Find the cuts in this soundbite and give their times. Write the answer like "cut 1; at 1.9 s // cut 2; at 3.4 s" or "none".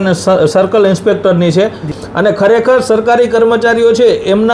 cut 1; at 2.0 s